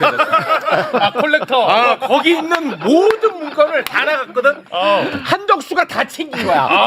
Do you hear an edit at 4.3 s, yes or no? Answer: no